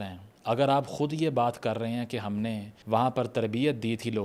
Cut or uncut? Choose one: uncut